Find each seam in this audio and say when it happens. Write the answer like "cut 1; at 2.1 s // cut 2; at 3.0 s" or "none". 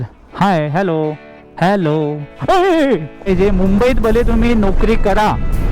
cut 1; at 3.3 s